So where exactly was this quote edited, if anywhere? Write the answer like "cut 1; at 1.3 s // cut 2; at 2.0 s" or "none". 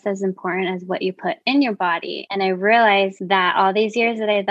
cut 1; at 2.2 s // cut 2; at 3.2 s